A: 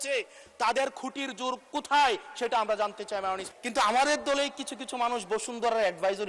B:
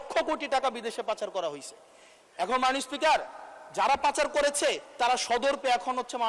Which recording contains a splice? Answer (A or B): A